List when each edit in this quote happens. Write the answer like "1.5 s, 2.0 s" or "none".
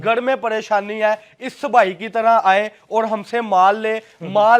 none